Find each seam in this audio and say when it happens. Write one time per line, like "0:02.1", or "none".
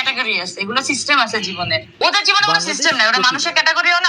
0:01.9

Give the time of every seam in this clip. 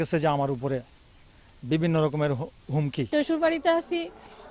0:03.0

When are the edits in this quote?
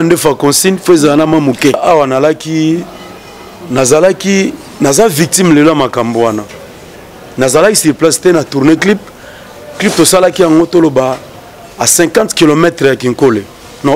0:01.8

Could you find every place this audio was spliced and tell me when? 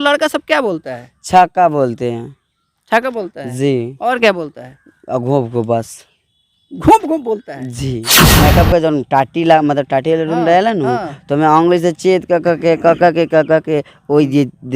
0:08.2

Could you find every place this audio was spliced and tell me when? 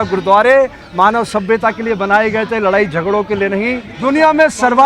0:03.9

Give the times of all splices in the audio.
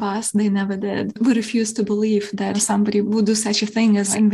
0:01.1
0:03.0

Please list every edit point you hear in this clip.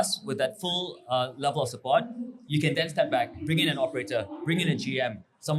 0:03.4

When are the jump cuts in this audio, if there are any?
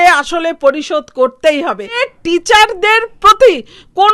0:02.0

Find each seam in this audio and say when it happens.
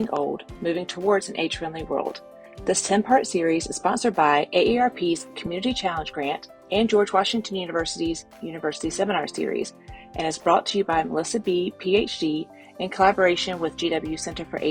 none

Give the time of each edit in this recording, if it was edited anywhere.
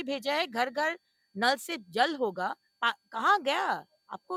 none

